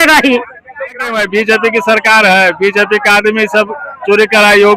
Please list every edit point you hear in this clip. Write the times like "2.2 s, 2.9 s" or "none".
1.2 s

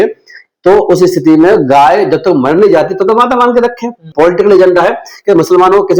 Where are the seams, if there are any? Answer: 4.1 s

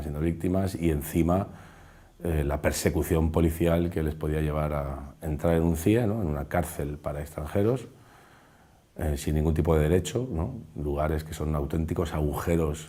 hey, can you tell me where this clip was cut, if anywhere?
none

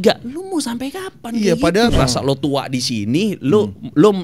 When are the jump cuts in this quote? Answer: 1.9 s

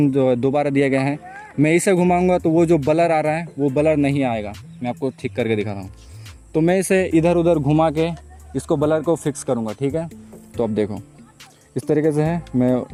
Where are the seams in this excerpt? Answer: none

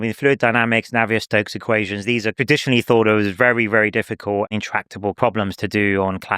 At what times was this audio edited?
5.2 s

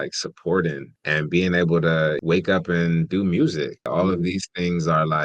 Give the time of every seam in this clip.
0.9 s, 2.2 s, 3.9 s

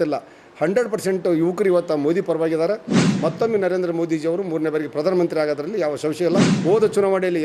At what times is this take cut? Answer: 3.2 s, 6.5 s

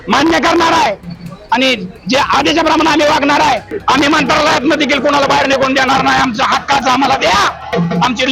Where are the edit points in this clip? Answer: 3.7 s

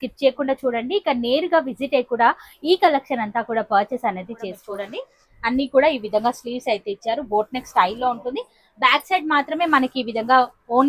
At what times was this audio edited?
4.6 s

